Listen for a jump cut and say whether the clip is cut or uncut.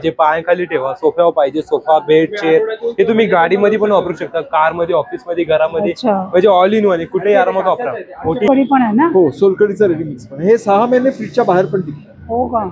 cut